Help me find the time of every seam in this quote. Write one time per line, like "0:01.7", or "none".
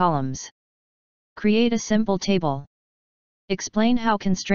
none